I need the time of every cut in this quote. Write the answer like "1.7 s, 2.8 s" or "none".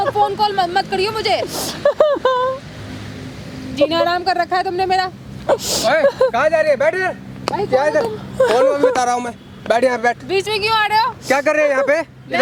none